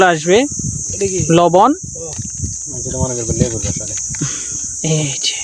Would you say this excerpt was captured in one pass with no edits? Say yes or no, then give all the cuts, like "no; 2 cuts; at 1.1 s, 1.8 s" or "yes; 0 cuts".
yes; 0 cuts